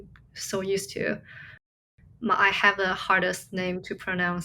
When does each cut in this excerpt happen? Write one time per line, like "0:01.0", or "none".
0:01.8